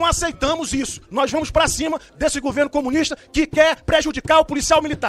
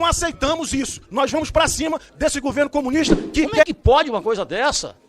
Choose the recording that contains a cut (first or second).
second